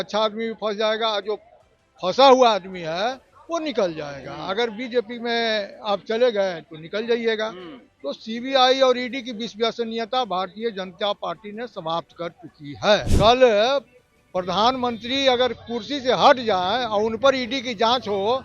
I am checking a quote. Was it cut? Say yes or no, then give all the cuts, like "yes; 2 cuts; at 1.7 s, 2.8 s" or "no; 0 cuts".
yes; 1 cut; at 13.1 s